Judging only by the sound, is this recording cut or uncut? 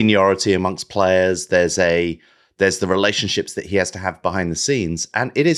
uncut